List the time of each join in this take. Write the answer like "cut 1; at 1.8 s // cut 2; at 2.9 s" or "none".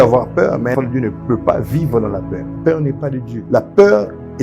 cut 1; at 0.7 s // cut 2; at 2.4 s // cut 3; at 3.3 s